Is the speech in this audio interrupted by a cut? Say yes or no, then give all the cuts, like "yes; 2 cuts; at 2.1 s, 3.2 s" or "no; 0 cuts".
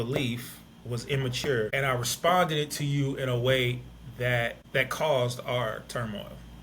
yes; 2 cuts; at 1.7 s, 4.6 s